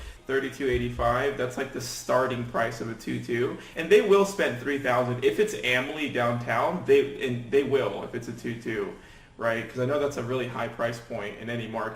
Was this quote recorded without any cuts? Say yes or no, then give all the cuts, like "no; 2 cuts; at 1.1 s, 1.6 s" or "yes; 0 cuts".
no; 1 cut; at 3.7 s